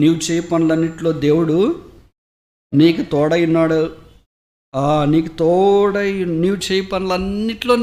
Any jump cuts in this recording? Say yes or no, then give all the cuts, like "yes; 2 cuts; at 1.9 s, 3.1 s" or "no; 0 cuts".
no; 0 cuts